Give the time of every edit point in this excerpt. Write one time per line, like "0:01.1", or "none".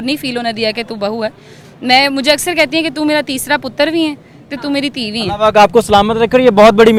none